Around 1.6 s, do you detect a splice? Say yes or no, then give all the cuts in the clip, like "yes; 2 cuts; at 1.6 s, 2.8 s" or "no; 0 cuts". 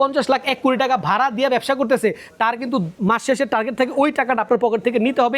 no; 1 cut; at 2.9 s